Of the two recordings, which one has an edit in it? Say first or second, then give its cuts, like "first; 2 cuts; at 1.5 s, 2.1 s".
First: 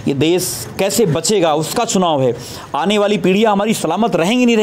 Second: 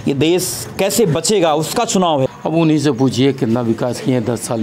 second; 1 cut; at 2.3 s